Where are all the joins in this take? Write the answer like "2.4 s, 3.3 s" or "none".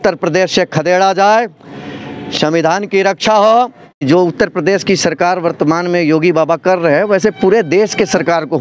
4.0 s